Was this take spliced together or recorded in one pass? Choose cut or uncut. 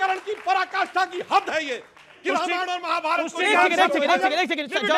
uncut